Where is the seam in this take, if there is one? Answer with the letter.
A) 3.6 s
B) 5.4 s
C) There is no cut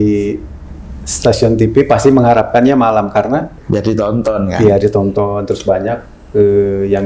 A